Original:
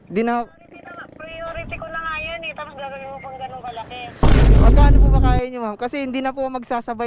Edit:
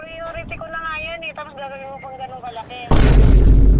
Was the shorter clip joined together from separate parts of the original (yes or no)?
yes